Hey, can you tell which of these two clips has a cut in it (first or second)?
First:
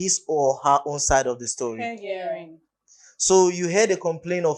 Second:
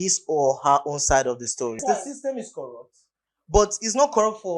second